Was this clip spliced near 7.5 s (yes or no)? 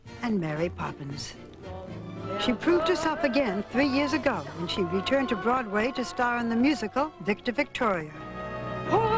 yes